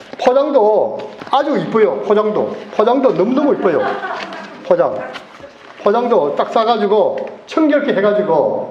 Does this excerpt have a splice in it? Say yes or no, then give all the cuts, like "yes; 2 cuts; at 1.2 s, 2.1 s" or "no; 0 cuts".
no; 0 cuts